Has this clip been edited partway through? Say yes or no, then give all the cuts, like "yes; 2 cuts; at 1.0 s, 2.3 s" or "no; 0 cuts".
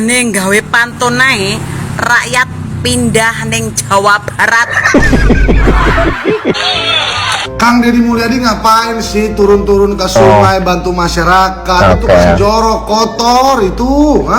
yes; 1 cut; at 6.4 s